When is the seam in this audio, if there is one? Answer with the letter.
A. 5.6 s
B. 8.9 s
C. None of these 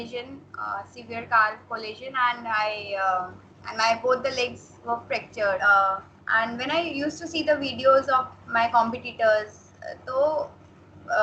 A